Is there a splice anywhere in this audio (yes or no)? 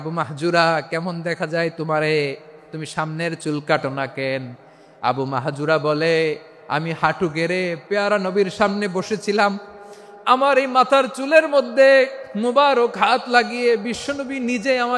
no